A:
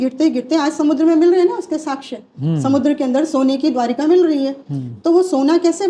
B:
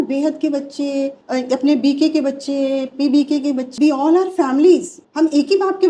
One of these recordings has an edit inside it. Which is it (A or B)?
B